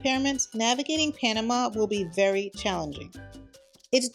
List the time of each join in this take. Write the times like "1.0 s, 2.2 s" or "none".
none